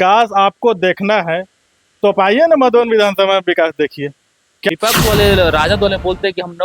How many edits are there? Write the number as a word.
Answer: one